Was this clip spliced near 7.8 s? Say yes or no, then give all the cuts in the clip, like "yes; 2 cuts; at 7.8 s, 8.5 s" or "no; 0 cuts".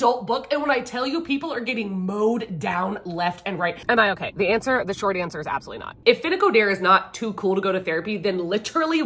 no; 2 cuts; at 3.8 s, 5.9 s